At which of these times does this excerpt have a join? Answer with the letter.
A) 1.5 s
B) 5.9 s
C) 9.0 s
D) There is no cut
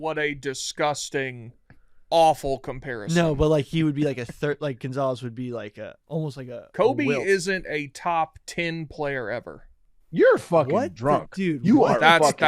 B